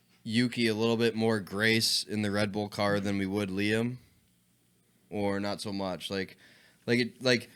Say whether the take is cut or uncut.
uncut